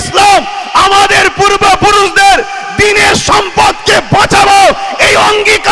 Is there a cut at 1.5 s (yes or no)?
no